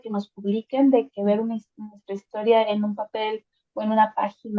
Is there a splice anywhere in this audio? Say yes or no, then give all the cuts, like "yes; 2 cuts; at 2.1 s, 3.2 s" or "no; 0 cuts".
no; 0 cuts